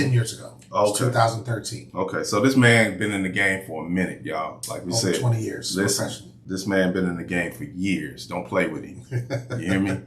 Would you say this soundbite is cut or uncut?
cut